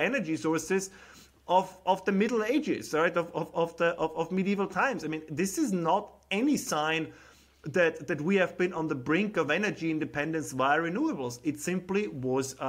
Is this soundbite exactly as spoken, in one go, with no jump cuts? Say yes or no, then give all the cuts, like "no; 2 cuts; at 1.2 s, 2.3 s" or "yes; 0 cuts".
yes; 0 cuts